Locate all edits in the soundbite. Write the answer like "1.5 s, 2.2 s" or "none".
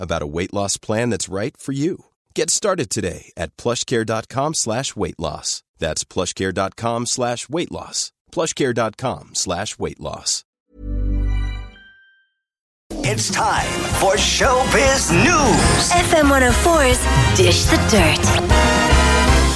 10.6 s, 12.9 s

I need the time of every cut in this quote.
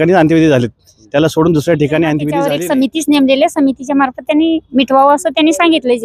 2.5 s

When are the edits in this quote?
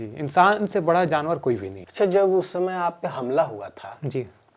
1.8 s

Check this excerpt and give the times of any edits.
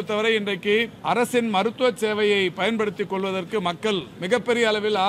0.9 s, 4.1 s

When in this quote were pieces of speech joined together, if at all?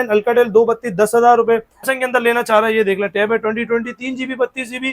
1.9 s

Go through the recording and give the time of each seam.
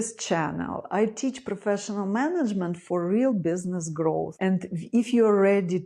none

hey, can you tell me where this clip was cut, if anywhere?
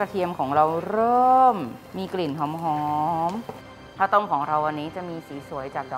3.8 s

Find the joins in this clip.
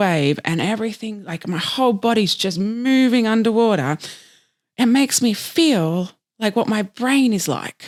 none

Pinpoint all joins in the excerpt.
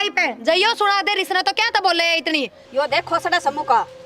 2.6 s

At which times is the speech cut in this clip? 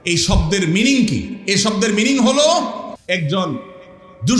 2.9 s

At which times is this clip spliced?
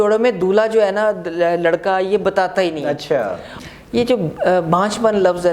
3.5 s

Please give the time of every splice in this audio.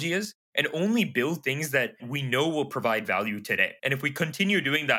2.0 s, 3.7 s

